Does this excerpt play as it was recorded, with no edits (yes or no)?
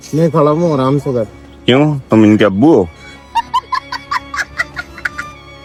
yes